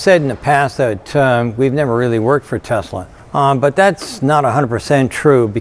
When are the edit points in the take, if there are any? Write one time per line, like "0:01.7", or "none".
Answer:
none